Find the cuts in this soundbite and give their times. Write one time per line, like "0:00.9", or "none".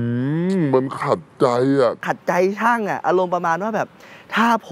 none